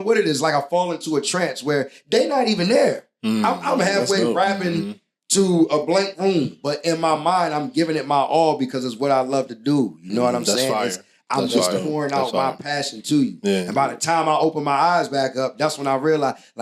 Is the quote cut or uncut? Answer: uncut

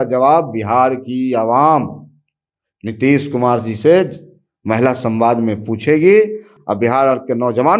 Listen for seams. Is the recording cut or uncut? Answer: cut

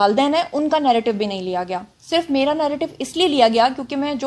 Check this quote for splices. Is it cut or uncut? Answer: uncut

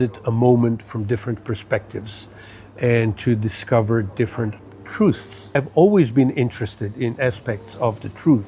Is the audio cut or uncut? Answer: cut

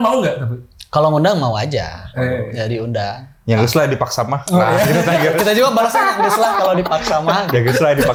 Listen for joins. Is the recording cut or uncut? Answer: uncut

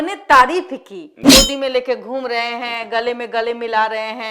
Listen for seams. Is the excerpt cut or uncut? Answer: cut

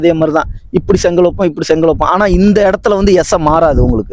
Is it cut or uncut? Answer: uncut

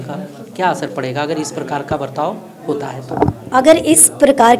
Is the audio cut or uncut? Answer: uncut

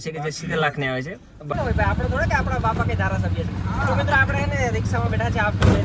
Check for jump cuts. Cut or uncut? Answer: cut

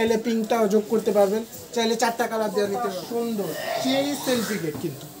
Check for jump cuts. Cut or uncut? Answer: cut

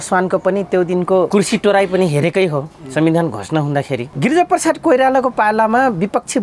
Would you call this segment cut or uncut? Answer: cut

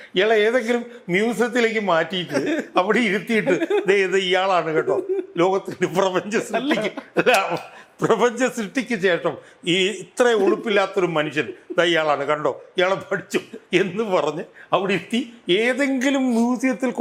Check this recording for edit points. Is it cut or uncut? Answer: uncut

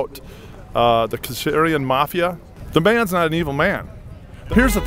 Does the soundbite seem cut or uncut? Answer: uncut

